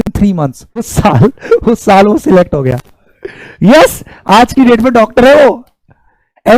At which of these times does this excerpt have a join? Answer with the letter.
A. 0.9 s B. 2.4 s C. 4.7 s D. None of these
A